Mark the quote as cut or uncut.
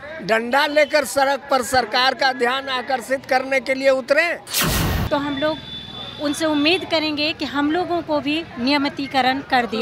cut